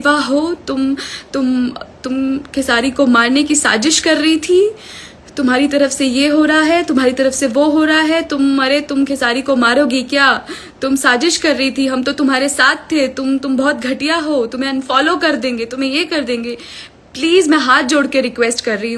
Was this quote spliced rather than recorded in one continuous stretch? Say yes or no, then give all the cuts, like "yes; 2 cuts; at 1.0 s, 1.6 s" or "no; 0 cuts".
no; 0 cuts